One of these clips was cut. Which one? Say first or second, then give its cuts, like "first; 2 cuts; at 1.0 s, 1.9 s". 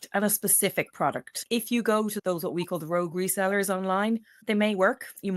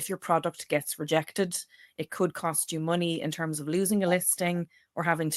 first; 1 cut; at 1.3 s